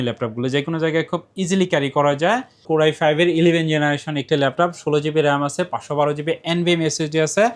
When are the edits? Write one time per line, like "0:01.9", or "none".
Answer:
0:02.6